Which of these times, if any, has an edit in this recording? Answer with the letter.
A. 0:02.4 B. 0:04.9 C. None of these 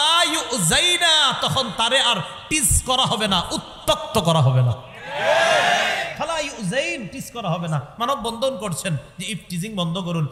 C